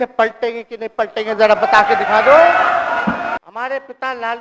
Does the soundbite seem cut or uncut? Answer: cut